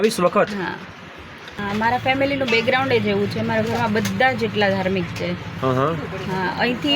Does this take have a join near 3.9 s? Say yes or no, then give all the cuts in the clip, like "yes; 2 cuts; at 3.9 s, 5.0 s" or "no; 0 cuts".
no; 1 cut; at 1.5 s